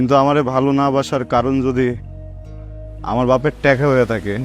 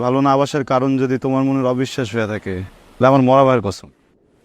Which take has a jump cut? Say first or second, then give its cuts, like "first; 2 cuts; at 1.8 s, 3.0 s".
second; 1 cut; at 2.8 s